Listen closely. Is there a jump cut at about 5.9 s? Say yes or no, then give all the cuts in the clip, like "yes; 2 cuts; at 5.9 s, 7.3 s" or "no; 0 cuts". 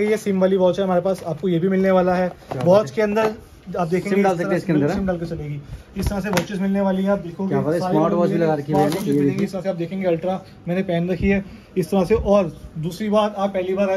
no; 0 cuts